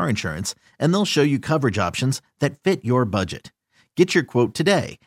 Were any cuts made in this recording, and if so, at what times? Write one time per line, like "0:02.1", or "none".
none